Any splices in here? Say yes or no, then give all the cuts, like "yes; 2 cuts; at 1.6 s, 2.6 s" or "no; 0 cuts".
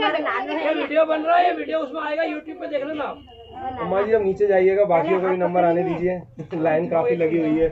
no; 0 cuts